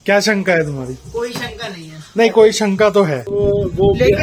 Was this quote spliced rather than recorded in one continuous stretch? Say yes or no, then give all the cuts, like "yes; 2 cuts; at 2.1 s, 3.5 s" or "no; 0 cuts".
yes; 1 cut; at 3.2 s